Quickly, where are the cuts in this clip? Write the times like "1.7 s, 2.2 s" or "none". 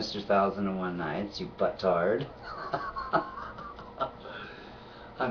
3.1 s